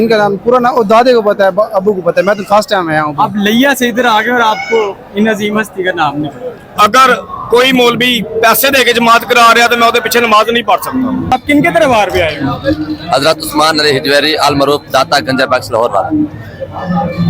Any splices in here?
yes; 2 cuts; at 6.7 s, 11.3 s

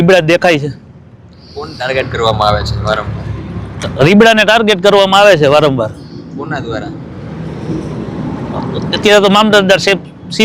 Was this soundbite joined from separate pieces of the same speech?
no; 0 cuts

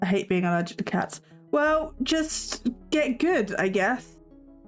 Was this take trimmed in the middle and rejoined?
no; 0 cuts

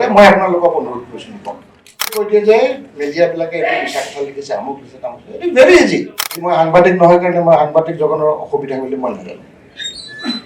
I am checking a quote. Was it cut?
yes; 2 cuts; at 2.2 s, 6.4 s

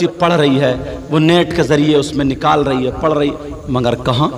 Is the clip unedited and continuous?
yes; 0 cuts

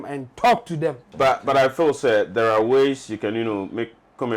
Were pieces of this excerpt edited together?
yes; 1 cut; at 1.0 s

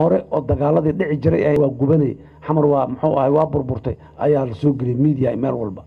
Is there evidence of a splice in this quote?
yes; 1 cut; at 1.6 s

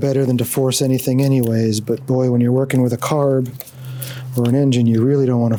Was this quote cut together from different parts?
no; 0 cuts

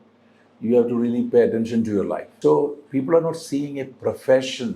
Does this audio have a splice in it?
yes; 1 cut; at 2.2 s

